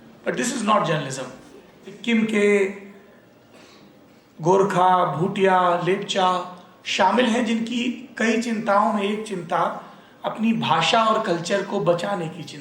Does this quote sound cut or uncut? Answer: cut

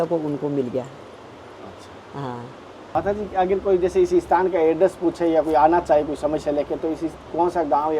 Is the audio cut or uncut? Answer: cut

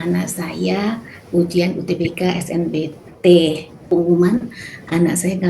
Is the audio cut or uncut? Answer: cut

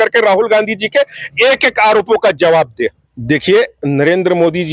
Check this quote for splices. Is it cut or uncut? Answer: cut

